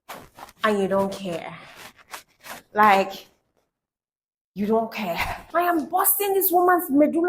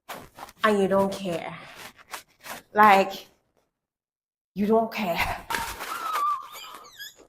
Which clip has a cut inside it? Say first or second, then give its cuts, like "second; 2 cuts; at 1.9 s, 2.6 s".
first; 1 cut; at 5.5 s